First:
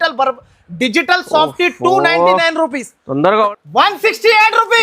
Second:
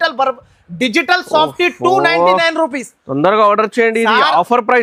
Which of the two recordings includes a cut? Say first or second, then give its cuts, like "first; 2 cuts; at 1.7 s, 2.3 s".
first; 1 cut; at 3.5 s